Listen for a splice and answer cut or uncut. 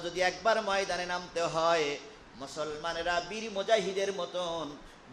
uncut